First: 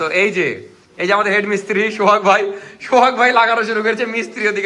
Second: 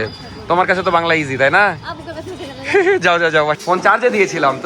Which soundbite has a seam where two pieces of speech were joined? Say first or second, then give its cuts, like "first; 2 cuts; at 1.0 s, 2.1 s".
second; 1 cut; at 3.6 s